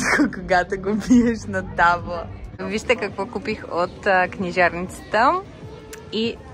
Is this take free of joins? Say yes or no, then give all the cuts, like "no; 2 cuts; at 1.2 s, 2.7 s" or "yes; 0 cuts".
no; 1 cut; at 2.5 s